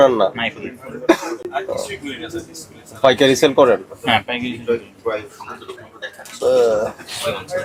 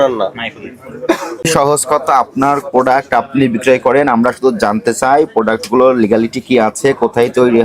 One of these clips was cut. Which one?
second; 1 cut; at 1.5 s

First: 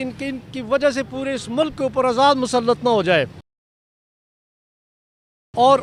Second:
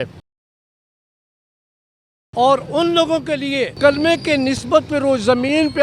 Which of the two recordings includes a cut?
second; 1 cut; at 3.7 s

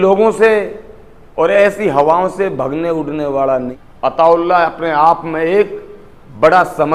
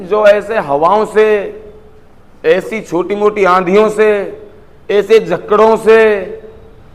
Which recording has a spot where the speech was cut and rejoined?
first; 1 cut; at 3.7 s

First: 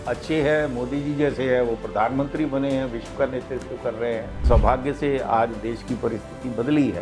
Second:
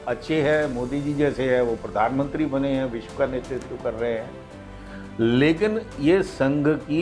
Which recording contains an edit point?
first; 1 cut; at 4.4 s

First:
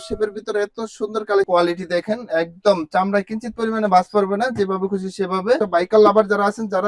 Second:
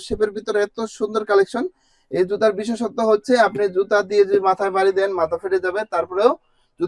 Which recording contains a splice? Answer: first; 2 cuts; at 1.5 s, 5.6 s

